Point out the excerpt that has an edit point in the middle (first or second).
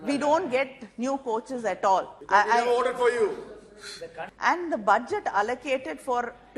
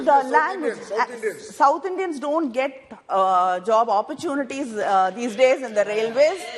first